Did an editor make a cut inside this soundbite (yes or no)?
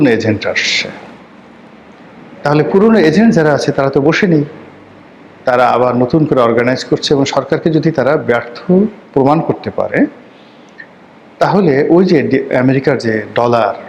no